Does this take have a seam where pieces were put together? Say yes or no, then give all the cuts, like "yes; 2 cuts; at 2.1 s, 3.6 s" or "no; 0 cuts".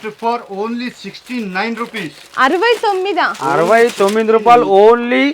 no; 0 cuts